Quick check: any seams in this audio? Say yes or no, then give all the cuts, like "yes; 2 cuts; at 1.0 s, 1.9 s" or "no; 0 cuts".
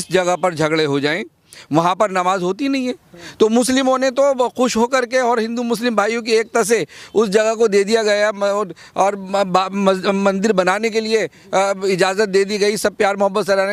no; 0 cuts